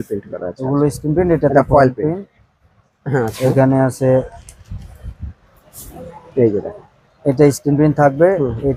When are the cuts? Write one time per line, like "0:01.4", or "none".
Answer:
none